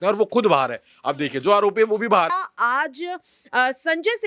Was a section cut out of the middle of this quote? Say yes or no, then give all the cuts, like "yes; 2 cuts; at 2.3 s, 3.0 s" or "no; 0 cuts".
yes; 1 cut; at 2.3 s